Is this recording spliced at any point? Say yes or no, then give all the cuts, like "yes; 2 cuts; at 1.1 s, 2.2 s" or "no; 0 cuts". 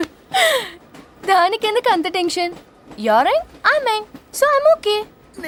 no; 0 cuts